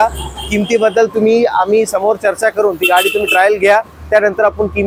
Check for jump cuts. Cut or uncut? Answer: uncut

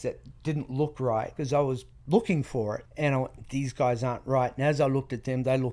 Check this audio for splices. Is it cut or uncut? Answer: uncut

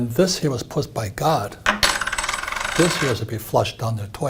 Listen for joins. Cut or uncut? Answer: uncut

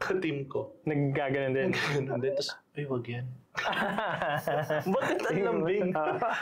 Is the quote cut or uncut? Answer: uncut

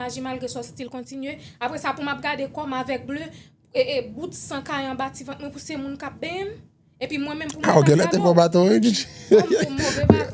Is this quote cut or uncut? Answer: uncut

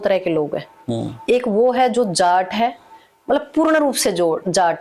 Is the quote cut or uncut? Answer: uncut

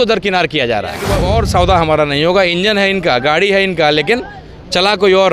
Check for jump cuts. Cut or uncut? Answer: cut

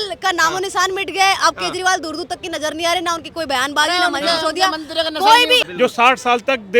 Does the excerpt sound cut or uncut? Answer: cut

